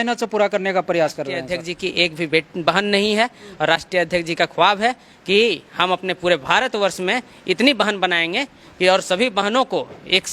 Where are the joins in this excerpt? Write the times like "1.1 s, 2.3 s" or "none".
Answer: 1.4 s